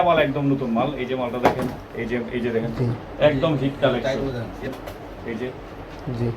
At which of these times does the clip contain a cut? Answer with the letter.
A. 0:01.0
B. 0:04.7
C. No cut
B